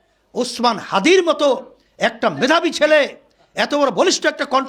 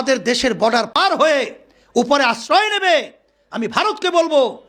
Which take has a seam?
second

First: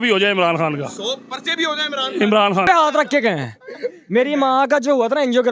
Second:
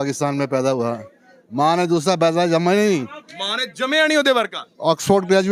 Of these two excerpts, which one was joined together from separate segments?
first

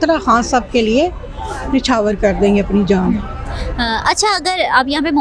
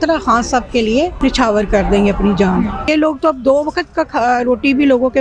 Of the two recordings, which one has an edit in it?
second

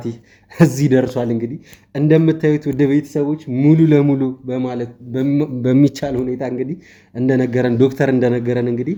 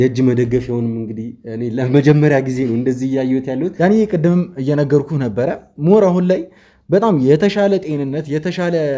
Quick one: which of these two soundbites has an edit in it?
second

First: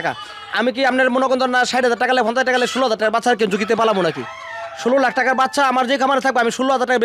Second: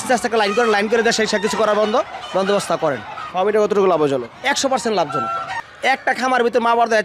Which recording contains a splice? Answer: second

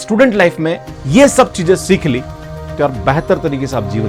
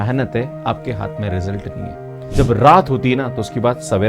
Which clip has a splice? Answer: second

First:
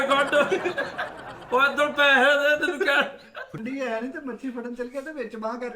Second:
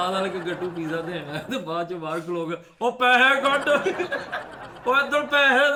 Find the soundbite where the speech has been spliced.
first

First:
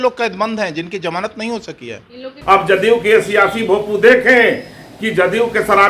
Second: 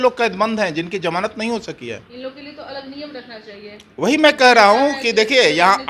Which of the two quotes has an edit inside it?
first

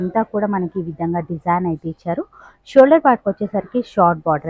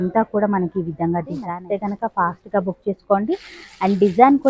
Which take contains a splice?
second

